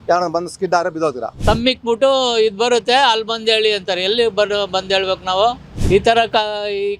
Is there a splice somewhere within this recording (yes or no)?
yes